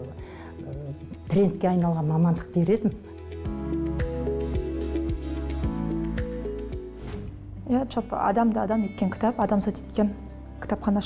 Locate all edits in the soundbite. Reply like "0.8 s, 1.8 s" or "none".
none